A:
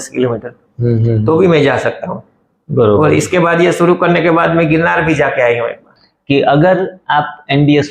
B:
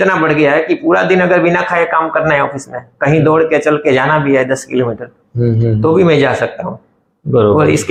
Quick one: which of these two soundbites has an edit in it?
A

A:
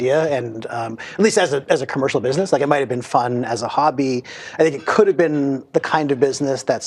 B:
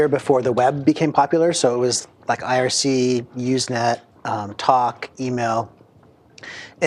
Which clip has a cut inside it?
B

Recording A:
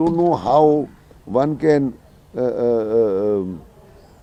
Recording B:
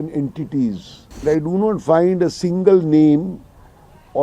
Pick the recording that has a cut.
B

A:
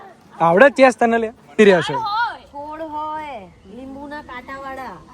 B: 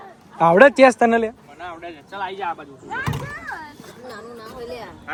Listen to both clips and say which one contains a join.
A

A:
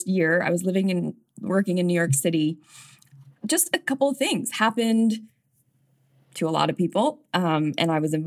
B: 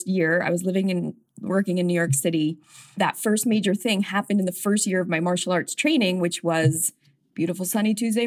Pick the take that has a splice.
B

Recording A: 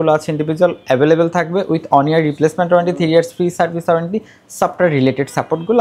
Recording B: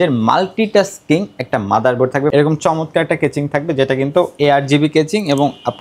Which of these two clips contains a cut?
B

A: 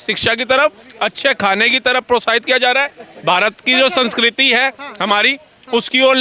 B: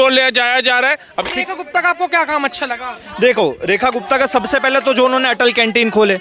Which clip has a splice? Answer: B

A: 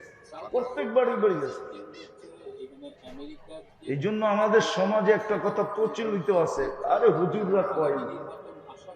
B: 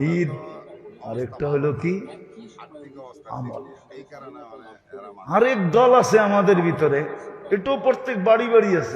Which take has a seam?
B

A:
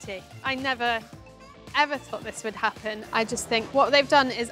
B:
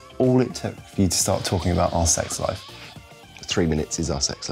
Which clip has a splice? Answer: A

